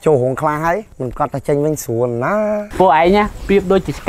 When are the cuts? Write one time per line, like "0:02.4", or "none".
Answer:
0:01.0
0:02.7